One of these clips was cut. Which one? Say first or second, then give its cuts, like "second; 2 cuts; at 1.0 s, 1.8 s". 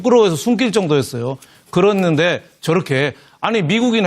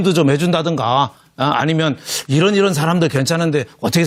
first; 1 cut; at 1.9 s